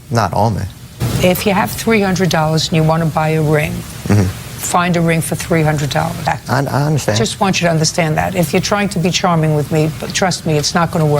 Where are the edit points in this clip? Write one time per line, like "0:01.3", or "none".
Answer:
0:01.0
0:06.3